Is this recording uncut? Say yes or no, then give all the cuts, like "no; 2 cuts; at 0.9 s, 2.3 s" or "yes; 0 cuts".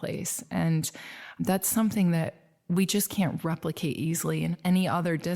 no; 2 cuts; at 1.4 s, 4.5 s